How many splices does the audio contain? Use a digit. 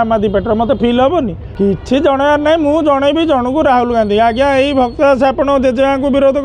1